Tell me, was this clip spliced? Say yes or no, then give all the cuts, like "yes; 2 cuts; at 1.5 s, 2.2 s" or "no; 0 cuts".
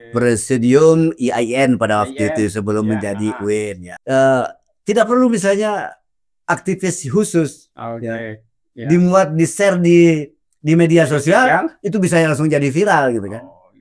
yes; 1 cut; at 3.9 s